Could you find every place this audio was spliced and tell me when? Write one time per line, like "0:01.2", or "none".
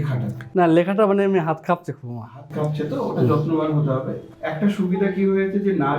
0:04.2